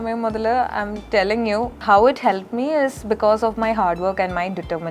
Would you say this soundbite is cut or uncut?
cut